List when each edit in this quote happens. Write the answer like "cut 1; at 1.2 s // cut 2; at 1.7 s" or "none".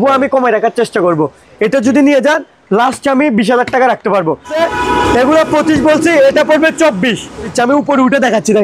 cut 1; at 4.6 s // cut 2; at 7.5 s